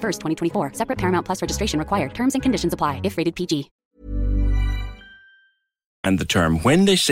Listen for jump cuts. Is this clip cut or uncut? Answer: uncut